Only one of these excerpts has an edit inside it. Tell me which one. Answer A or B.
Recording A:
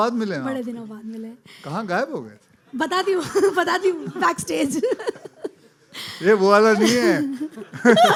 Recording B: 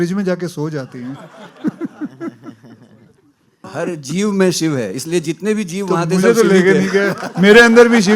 B